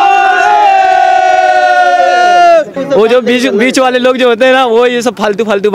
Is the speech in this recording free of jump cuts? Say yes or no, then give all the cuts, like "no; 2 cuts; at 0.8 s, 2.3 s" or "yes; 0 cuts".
no; 1 cut; at 2.8 s